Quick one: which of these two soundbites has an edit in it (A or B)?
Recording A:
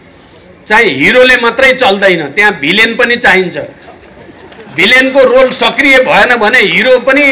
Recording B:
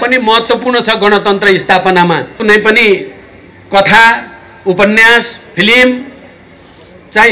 B